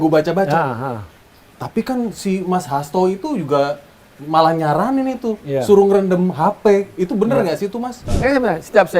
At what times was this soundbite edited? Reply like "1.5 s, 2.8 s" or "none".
8.0 s